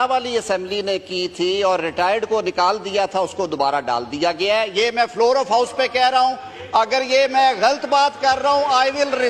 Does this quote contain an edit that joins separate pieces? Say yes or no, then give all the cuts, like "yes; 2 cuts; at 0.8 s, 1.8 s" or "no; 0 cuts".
no; 0 cuts